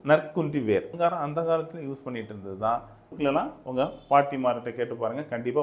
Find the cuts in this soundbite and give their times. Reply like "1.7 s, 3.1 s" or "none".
0.9 s, 3.1 s